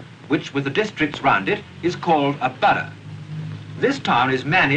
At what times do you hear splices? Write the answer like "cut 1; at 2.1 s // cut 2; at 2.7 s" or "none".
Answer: none